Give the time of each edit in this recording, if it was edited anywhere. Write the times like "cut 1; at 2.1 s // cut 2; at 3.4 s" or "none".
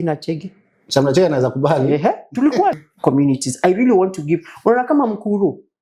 cut 1; at 2.8 s